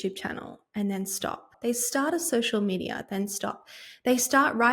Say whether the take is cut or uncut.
cut